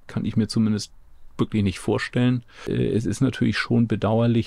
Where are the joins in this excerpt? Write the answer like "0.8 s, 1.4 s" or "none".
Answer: 2.6 s